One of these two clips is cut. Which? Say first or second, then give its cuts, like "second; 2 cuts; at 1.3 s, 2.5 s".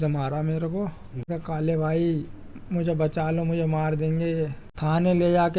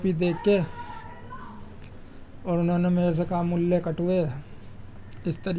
first; 2 cuts; at 1.3 s, 4.6 s